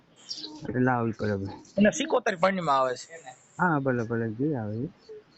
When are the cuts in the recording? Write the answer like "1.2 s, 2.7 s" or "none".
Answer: none